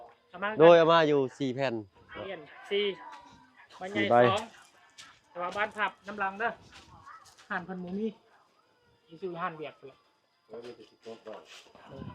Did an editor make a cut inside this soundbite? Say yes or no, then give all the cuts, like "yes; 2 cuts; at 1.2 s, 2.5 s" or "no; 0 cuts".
no; 0 cuts